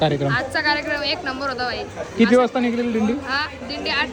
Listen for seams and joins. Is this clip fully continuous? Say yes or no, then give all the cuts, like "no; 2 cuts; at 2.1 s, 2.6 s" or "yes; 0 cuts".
yes; 0 cuts